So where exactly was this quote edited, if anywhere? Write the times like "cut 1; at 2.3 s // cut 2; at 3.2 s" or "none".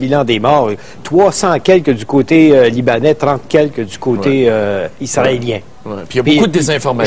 cut 1; at 2.0 s